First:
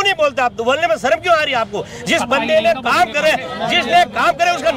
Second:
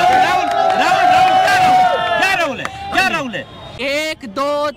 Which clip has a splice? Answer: second; 1 cut; at 3.7 s

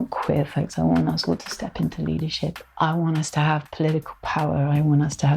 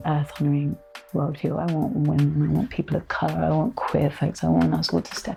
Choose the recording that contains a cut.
first; 1 cut; at 2.6 s

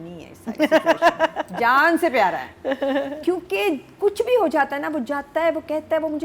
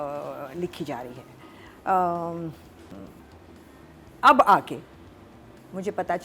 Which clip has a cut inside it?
second; 1 cut; at 2.9 s

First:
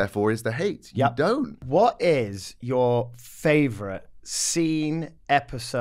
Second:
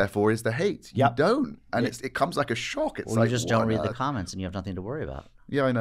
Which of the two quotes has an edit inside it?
first; 1 cut; at 1.6 s

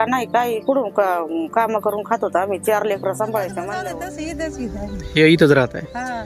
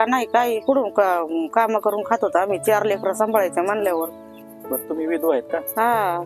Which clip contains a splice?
first; 1 cut; at 3.7 s

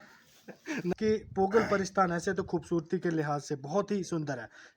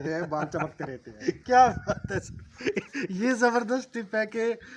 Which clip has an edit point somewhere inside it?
first; 1 cut; at 0.9 s

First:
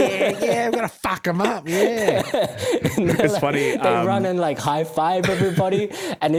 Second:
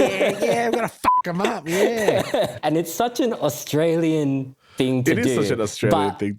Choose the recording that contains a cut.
second; 1 cut; at 2.6 s

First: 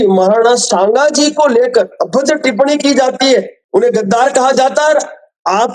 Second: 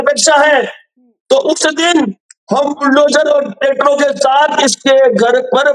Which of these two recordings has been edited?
first; 1 cut; at 3.6 s

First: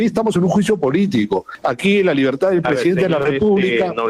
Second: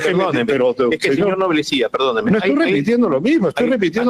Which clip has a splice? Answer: first; 1 cut; at 1.5 s

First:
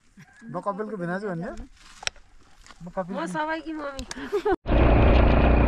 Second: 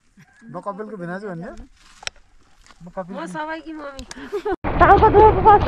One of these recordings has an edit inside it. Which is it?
second; 1 cut; at 4.6 s

